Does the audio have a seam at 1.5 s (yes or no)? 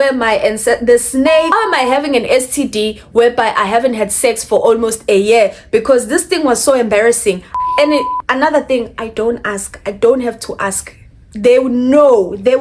yes